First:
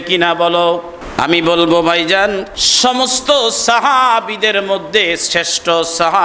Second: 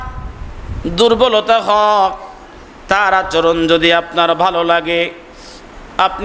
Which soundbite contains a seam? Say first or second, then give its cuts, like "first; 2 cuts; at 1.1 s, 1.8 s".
first; 2 cuts; at 1.0 s, 2.6 s